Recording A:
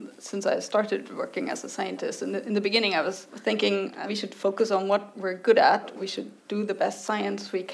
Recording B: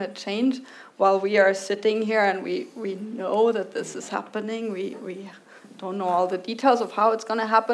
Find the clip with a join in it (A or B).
A